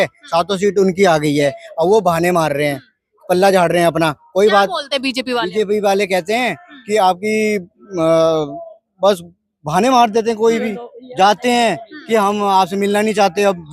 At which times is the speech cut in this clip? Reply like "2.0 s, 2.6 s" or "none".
none